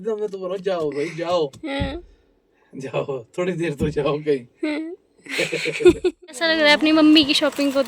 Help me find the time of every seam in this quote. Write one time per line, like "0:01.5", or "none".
0:06.4